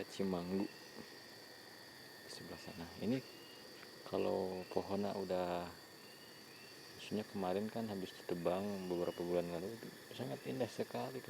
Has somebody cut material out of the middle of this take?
no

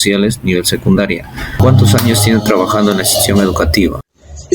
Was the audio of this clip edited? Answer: yes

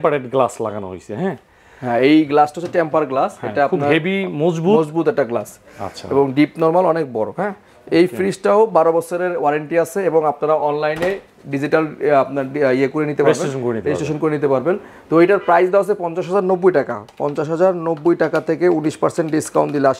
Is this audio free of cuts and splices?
yes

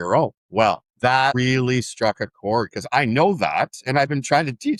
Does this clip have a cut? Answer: no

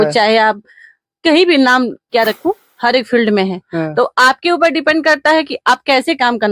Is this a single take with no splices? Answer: yes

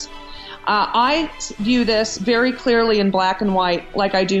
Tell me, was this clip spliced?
no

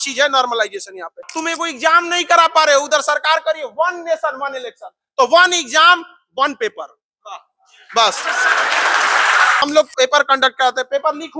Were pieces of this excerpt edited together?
yes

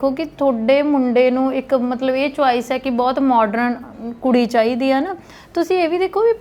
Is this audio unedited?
yes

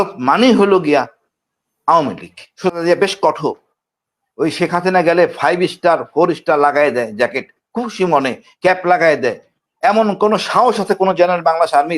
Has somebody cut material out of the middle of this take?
yes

